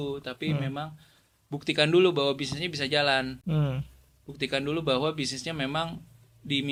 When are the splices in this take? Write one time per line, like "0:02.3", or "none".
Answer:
none